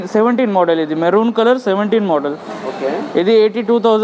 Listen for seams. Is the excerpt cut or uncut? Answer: uncut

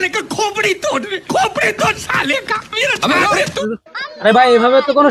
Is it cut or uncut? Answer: uncut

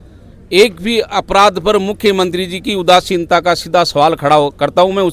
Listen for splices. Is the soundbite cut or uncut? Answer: uncut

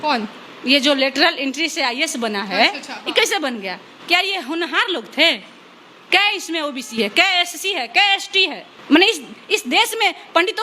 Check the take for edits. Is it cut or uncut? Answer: cut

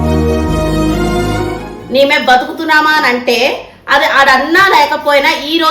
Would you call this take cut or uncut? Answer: cut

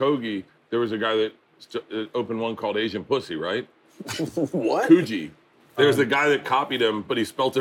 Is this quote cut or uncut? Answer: cut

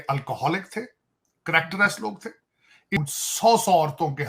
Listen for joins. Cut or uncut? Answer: cut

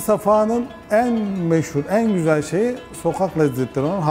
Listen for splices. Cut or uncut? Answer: uncut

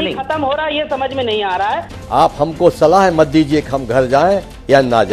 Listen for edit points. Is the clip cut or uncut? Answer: cut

